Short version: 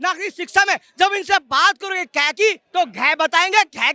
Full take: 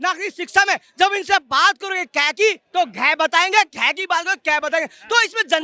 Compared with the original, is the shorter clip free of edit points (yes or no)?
yes